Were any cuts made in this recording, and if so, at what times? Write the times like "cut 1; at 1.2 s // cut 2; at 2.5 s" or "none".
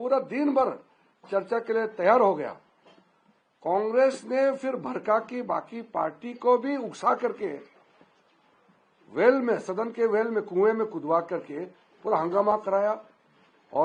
none